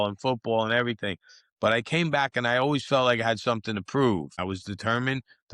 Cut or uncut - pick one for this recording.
cut